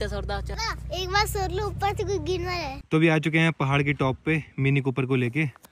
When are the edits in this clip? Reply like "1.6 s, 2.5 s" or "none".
2.8 s